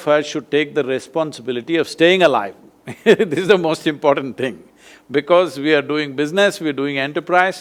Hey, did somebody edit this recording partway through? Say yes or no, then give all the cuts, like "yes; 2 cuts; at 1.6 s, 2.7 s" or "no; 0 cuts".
no; 0 cuts